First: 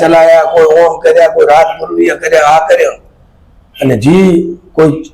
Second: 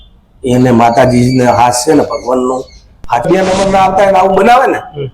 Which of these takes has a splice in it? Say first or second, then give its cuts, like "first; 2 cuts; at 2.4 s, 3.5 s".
second; 1 cut; at 3.2 s